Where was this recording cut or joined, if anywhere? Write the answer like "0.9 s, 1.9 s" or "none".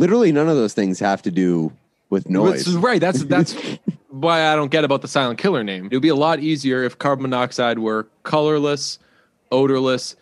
5.9 s